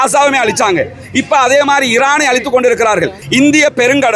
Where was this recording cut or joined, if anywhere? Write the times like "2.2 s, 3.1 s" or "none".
3.2 s

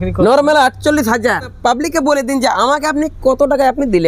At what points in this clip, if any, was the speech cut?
1.5 s

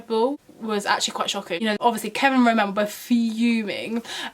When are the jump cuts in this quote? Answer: 1.8 s

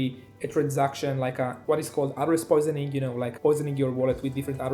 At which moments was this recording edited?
none

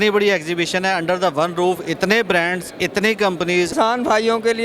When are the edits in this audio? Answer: 3.7 s

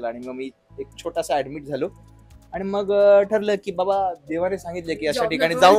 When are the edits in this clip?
none

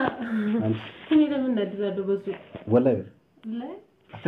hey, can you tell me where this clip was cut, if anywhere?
none

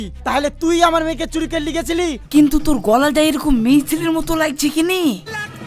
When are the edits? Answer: 2.2 s

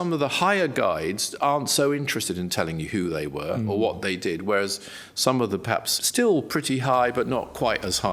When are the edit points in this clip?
6.0 s

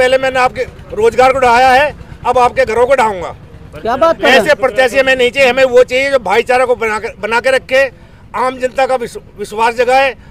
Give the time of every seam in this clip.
none

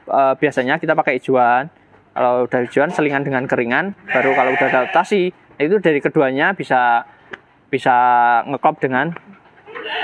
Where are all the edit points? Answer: none

